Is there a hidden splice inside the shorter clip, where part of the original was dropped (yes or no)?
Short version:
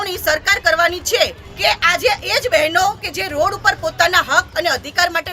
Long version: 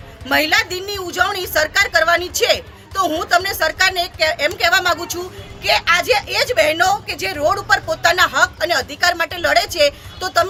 yes